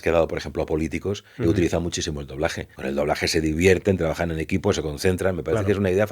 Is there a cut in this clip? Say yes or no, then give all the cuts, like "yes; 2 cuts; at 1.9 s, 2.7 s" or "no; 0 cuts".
yes; 1 cut; at 2.7 s